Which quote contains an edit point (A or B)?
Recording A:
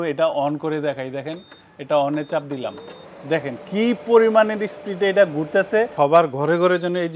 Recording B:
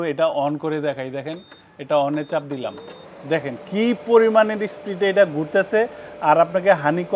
A